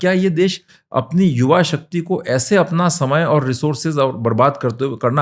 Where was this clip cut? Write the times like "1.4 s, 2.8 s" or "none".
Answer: none